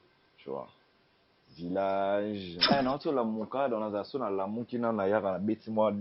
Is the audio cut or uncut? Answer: cut